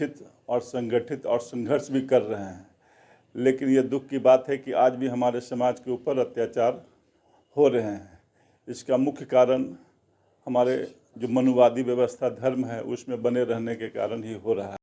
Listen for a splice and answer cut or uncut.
uncut